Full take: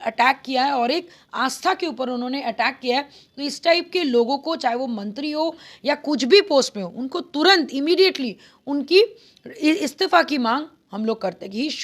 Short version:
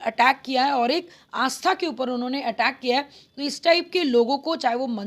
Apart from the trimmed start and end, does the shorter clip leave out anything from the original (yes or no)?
no